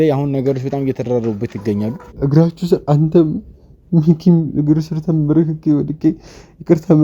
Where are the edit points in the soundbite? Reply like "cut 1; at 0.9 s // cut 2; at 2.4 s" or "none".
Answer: cut 1; at 2.0 s